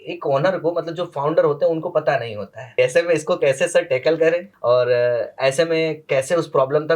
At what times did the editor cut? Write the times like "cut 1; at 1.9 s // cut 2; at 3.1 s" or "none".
cut 1; at 2.6 s // cut 2; at 4.5 s